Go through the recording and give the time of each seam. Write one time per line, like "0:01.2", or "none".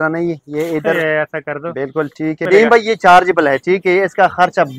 0:02.4